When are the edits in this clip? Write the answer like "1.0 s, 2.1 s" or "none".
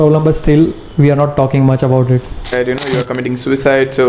2.5 s